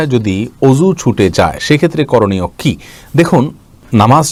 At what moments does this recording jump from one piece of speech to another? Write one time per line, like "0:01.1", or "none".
none